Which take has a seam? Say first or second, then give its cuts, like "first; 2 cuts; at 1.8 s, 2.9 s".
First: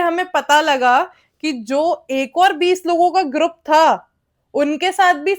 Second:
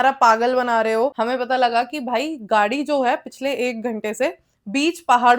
second; 1 cut; at 1.1 s